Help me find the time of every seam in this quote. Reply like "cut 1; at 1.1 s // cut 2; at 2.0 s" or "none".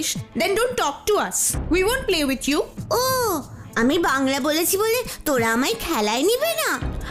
none